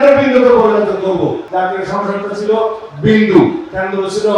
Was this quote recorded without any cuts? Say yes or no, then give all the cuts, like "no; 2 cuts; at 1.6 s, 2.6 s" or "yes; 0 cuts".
no; 1 cut; at 1.4 s